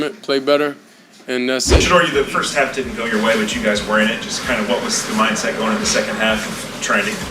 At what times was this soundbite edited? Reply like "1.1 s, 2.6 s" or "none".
1.8 s